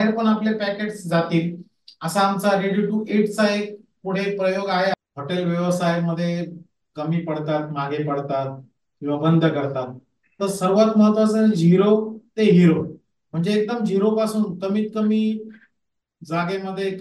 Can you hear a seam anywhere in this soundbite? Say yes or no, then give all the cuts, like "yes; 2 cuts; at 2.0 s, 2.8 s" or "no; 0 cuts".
yes; 1 cut; at 4.9 s